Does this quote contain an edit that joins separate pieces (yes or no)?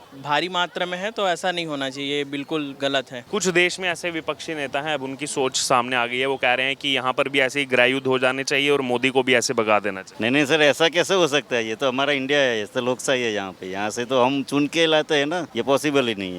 yes